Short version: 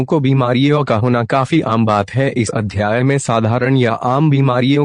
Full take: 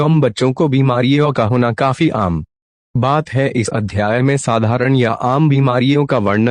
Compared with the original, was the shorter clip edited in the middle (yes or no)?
yes